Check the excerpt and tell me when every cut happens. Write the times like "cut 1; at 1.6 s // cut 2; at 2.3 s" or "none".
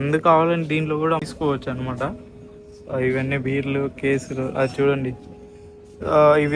cut 1; at 1.3 s